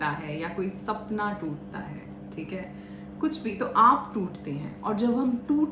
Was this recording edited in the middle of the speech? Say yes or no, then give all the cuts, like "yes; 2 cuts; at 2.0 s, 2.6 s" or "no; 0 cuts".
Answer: no; 0 cuts